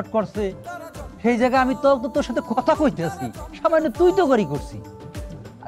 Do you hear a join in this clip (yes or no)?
no